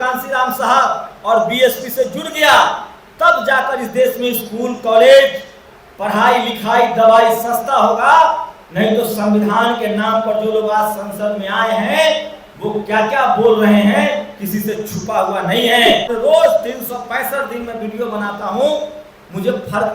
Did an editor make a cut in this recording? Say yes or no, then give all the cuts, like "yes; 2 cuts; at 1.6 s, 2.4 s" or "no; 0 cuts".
yes; 1 cut; at 16.1 s